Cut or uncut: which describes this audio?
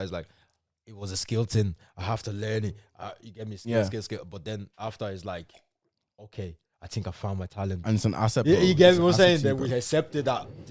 uncut